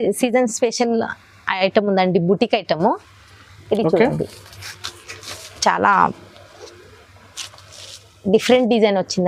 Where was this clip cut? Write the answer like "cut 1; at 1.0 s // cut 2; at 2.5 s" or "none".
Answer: none